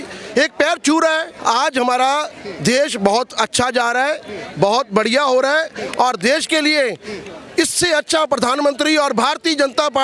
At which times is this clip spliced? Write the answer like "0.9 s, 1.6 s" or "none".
1.3 s